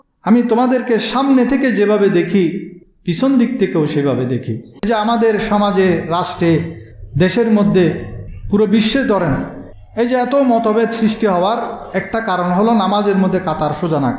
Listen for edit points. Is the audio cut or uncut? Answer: cut